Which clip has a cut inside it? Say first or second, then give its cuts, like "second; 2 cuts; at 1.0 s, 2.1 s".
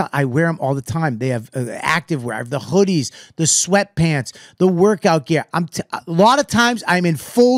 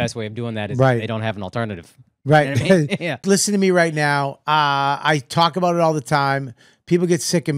second; 1 cut; at 3.1 s